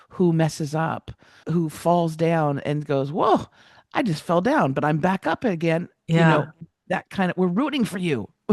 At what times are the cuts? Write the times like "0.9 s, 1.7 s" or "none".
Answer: 1.4 s